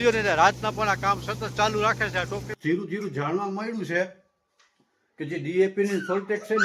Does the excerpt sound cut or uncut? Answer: cut